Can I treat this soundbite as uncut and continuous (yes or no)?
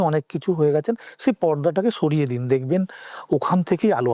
yes